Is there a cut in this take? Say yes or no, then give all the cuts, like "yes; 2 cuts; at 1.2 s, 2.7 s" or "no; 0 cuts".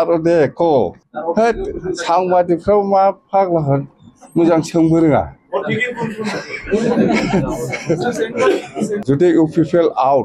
yes; 1 cut; at 9.0 s